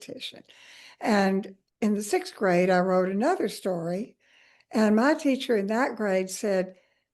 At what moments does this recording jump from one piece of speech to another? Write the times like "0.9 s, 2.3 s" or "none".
1.6 s